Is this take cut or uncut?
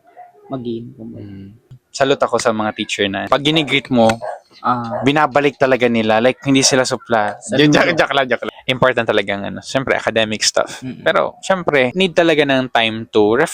cut